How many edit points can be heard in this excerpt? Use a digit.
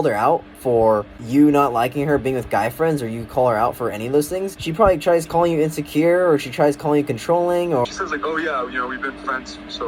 3